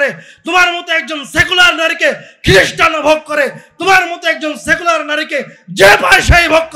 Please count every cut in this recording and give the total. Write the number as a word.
zero